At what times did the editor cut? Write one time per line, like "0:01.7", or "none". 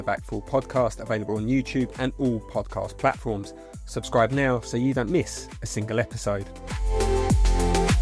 none